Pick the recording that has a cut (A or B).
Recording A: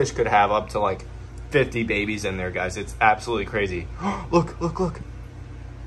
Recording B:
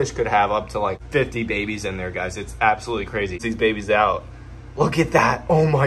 B